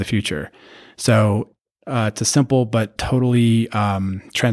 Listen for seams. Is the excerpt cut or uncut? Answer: cut